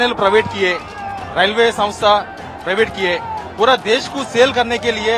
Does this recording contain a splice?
no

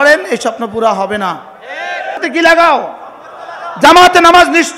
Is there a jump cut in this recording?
yes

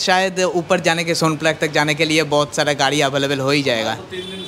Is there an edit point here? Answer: no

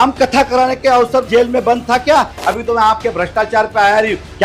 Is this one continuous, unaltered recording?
no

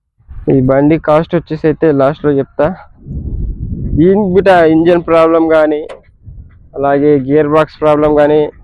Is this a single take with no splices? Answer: yes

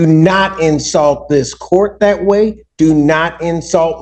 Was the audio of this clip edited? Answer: no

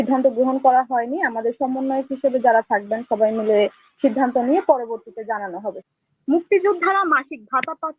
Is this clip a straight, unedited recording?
no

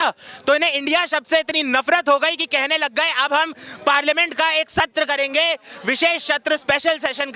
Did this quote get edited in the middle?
no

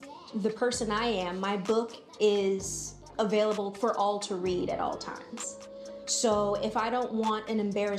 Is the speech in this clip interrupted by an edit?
no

